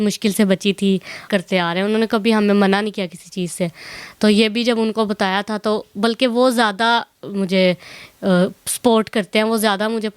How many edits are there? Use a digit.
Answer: 1